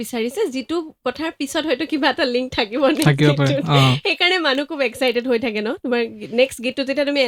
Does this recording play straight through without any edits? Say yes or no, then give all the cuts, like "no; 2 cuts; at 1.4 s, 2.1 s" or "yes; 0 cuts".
yes; 0 cuts